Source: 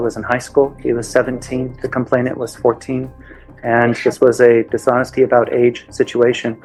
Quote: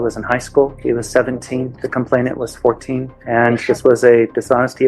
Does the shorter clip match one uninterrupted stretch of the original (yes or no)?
no